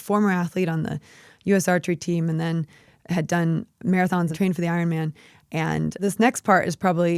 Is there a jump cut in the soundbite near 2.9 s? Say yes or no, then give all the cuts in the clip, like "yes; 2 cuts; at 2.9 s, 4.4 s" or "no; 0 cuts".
no; 1 cut; at 6.0 s